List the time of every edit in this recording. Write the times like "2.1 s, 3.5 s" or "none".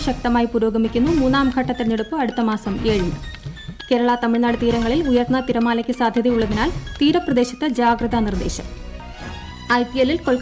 9.2 s